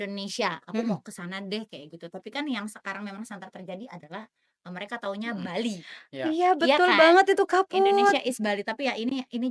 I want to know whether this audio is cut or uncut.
uncut